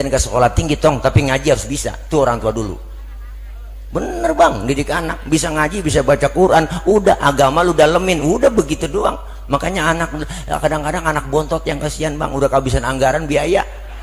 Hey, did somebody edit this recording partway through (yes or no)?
no